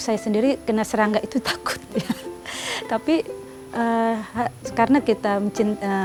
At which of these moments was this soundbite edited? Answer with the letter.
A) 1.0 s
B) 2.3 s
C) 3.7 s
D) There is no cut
D